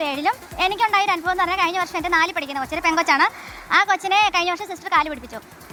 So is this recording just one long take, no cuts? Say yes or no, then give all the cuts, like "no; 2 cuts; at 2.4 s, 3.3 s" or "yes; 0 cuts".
yes; 0 cuts